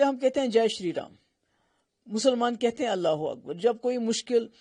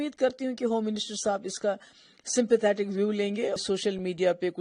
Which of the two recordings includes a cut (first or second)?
second